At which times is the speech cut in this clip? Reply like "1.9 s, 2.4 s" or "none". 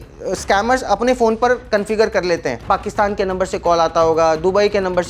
2.6 s